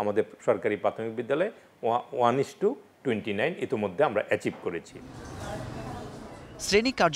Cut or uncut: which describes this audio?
uncut